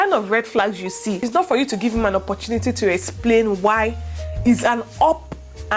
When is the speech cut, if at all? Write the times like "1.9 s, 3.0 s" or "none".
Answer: none